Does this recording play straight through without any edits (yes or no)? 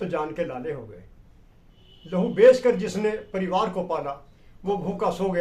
yes